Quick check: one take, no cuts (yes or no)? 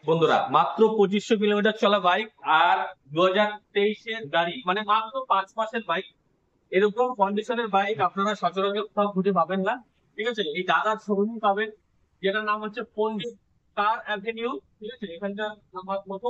yes